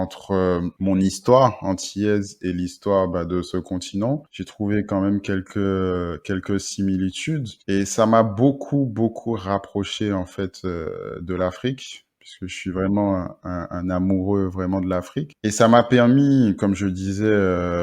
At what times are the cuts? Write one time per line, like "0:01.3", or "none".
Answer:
none